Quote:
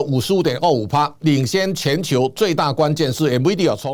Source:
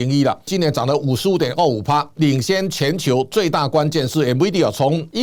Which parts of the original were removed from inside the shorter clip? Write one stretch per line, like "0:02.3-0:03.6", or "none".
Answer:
none